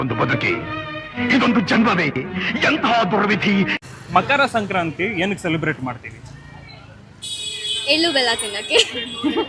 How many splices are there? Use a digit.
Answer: 1